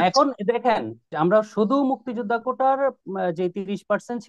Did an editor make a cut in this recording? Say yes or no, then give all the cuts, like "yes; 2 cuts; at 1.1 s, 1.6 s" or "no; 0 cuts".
yes; 1 cut; at 1.1 s